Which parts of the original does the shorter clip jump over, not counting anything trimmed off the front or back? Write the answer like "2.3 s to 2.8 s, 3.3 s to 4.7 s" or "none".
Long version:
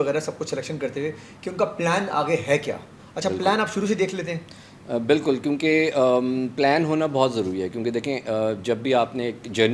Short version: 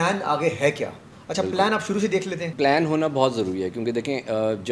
4.4 s to 6.5 s